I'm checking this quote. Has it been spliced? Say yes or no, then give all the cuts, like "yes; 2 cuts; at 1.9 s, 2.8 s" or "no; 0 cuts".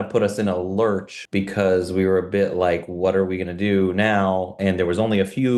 no; 0 cuts